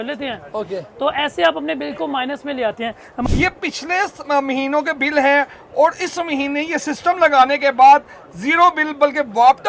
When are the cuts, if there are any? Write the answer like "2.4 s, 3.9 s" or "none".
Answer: 3.2 s

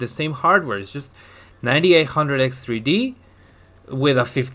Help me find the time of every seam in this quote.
none

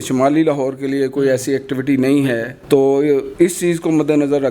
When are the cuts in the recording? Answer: 2.5 s, 3.3 s

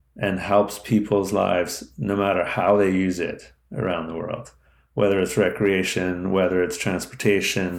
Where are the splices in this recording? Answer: none

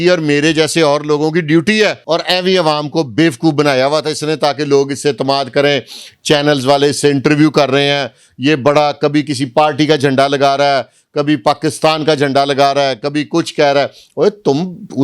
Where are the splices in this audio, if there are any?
2.0 s

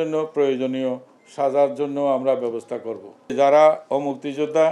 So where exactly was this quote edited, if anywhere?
3.3 s

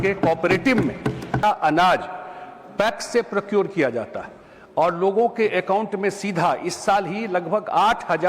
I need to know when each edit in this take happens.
1.4 s

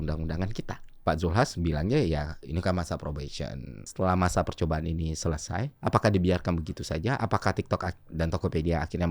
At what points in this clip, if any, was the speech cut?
1.0 s, 3.9 s, 5.7 s

